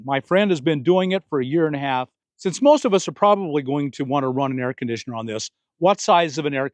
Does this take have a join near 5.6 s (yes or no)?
no